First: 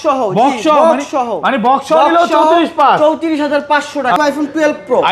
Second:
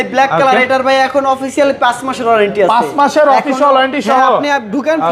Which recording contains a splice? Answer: first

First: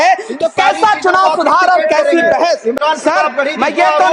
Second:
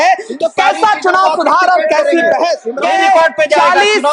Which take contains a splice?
second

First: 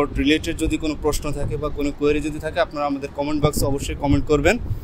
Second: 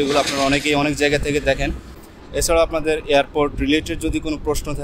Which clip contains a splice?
second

